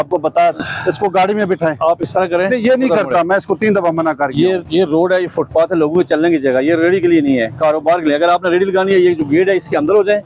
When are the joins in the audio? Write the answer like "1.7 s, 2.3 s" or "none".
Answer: none